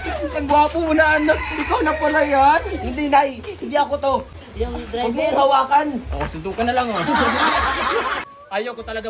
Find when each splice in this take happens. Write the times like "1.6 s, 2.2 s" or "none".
4.3 s, 8.2 s